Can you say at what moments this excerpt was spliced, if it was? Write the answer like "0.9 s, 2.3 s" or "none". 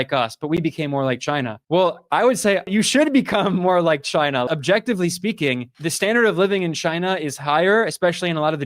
2.7 s, 4.5 s

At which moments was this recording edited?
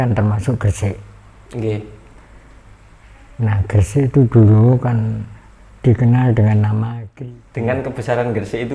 7.0 s

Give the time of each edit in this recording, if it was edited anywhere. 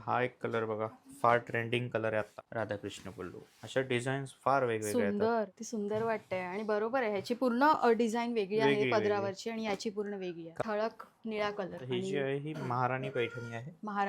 2.4 s, 10.6 s

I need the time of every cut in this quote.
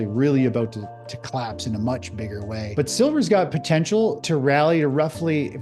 2.6 s, 4.2 s

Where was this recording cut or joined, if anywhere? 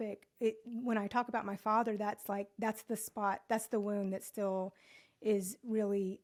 none

